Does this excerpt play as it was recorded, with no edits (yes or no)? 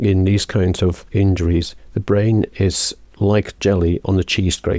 no